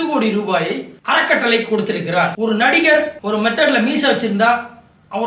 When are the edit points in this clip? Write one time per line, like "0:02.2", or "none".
0:02.3